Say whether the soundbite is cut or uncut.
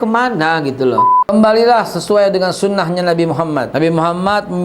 cut